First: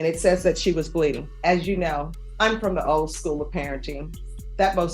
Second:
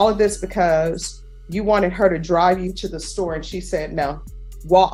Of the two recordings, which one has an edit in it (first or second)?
first